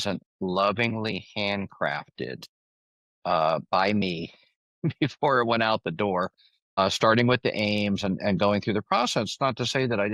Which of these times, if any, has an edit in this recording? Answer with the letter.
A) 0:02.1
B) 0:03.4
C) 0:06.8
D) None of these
C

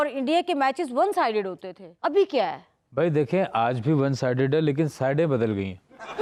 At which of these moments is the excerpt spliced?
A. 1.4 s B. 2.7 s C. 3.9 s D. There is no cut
D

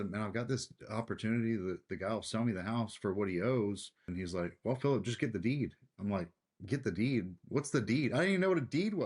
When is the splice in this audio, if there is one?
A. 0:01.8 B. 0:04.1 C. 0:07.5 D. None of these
B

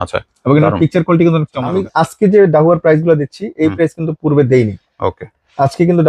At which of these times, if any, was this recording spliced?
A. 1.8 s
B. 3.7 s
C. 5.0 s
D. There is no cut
A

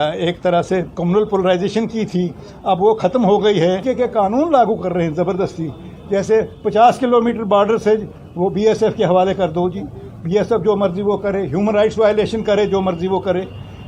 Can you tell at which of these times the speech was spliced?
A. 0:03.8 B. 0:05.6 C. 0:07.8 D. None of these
A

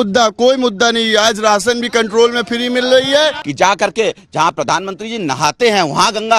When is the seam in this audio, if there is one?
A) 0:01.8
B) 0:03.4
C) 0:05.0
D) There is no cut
B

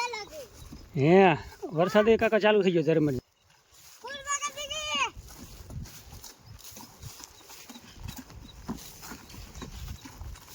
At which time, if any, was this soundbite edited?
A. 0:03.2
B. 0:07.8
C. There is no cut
A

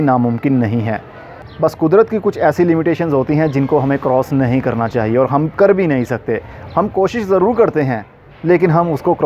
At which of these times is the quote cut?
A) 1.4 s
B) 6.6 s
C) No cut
C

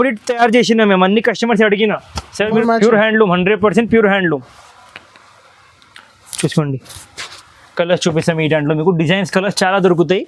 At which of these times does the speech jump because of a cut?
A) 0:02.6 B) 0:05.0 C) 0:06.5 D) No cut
A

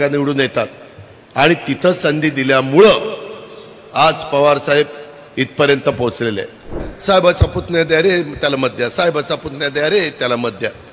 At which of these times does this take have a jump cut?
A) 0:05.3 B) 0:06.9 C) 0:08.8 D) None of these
B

